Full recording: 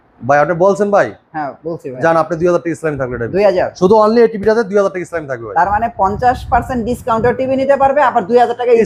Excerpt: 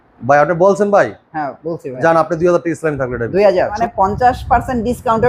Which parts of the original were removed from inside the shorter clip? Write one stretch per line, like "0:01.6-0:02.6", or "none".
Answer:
0:03.8-0:05.8